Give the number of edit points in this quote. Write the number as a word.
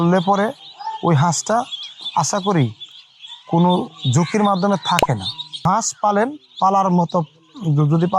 one